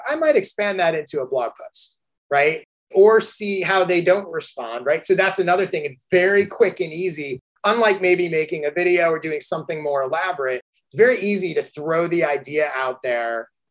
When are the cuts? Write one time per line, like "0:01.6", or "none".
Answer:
0:02.8